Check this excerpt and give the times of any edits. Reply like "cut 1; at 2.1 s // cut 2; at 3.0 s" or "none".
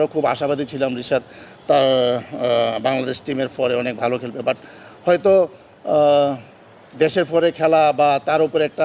none